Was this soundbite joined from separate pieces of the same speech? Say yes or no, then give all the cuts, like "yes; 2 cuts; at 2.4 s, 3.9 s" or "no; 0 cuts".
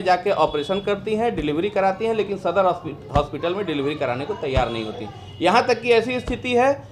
no; 0 cuts